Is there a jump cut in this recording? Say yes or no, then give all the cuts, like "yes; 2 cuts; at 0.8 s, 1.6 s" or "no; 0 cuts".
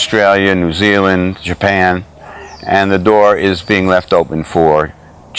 no; 0 cuts